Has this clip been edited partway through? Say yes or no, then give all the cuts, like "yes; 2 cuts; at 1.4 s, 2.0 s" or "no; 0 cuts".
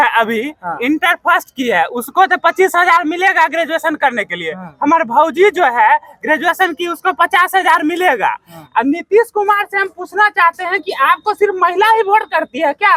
no; 0 cuts